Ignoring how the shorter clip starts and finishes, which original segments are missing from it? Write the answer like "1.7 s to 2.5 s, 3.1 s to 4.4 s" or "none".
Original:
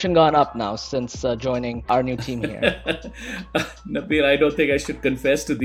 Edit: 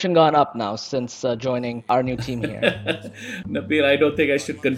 3.4 s to 3.8 s